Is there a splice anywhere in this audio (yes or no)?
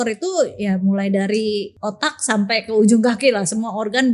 yes